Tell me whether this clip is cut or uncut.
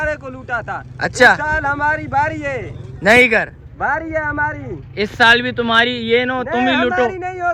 uncut